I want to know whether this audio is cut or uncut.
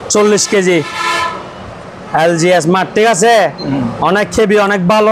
uncut